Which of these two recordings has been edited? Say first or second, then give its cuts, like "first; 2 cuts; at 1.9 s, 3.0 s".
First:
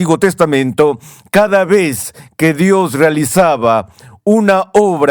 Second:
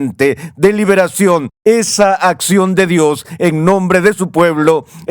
second; 1 cut; at 1.5 s